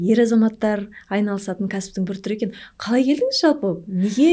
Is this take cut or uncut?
uncut